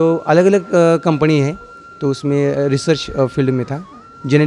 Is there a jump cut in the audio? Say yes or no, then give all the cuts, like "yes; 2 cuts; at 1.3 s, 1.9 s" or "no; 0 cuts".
no; 0 cuts